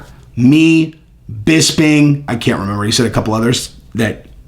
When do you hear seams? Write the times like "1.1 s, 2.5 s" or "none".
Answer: 2.3 s